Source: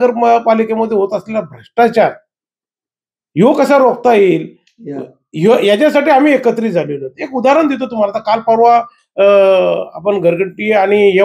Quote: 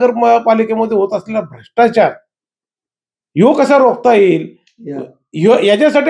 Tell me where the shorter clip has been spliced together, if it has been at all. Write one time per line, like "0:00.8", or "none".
none